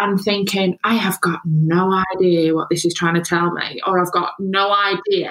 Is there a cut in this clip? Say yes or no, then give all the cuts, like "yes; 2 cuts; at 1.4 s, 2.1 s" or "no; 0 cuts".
no; 0 cuts